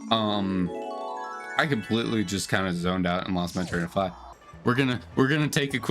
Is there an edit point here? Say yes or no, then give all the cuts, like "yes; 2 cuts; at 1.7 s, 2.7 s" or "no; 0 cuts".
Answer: yes; 1 cut; at 4.2 s